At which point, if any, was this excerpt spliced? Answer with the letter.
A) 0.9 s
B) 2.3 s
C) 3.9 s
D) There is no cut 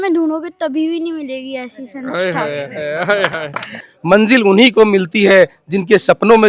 C